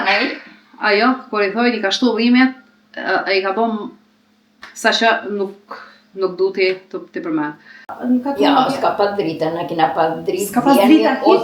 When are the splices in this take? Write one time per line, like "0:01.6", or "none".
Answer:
0:07.9